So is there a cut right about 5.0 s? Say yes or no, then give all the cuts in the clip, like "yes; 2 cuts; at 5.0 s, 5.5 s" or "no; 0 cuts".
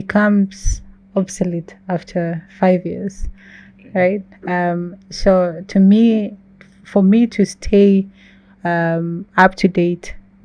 no; 0 cuts